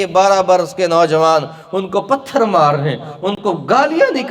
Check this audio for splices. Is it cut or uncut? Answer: uncut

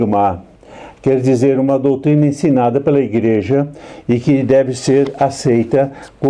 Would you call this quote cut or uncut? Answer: uncut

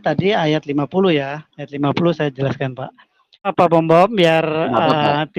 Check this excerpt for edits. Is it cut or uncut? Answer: cut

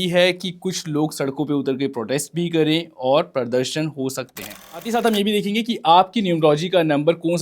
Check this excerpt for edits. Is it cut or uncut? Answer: cut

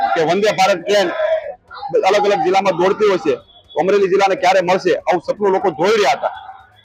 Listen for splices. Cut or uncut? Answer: uncut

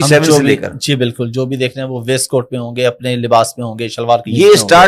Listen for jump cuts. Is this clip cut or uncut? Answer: uncut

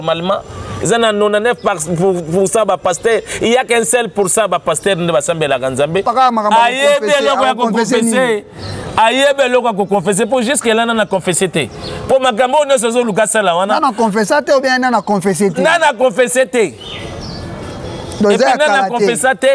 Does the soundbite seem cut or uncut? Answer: cut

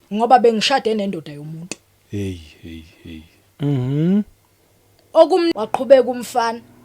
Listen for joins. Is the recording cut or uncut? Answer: cut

